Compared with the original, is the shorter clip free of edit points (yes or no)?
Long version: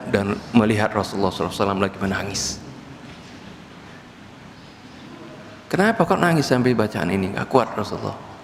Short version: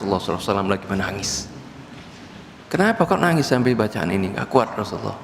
no